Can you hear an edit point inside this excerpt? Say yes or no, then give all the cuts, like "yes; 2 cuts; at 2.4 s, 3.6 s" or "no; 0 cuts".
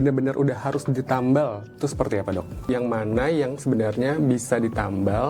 yes; 1 cut; at 2.7 s